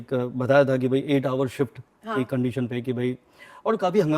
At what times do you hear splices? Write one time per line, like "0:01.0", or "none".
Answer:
none

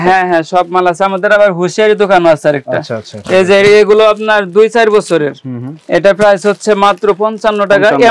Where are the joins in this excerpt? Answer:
none

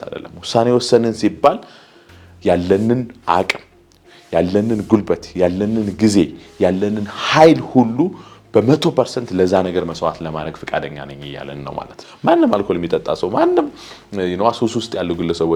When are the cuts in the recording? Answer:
0:12.1

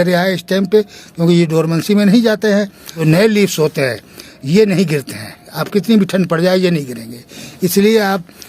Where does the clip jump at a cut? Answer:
0:02.9

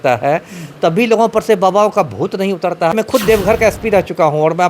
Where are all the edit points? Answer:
0:02.9

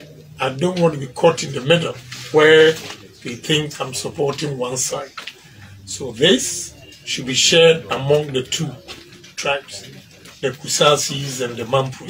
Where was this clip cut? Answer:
none

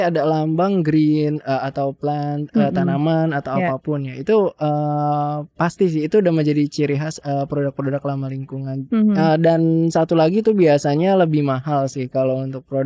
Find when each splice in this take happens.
none

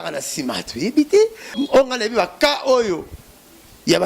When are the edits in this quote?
0:01.6

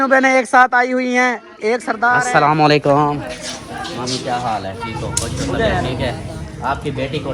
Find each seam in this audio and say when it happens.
0:02.2

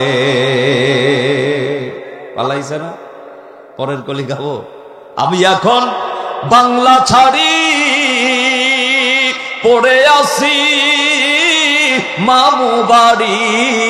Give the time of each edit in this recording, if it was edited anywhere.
none

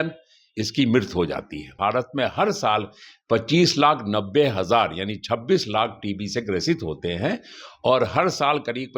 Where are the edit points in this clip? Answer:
0:01.7

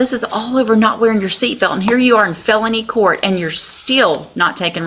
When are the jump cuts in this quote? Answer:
none

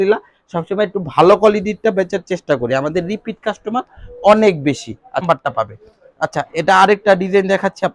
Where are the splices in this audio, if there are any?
0:05.2

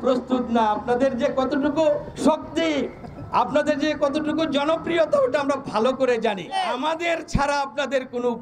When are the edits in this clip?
0:02.1
0:06.5

